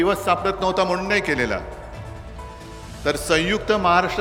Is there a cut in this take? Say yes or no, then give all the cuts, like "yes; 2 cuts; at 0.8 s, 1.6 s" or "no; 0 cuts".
no; 0 cuts